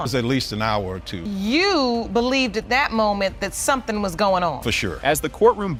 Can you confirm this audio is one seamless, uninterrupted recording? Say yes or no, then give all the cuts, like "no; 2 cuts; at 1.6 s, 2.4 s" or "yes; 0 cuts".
yes; 0 cuts